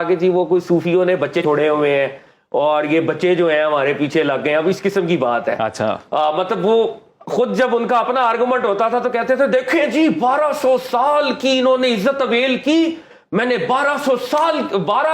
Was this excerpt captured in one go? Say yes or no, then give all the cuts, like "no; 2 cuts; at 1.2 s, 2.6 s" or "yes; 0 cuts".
no; 1 cut; at 1.4 s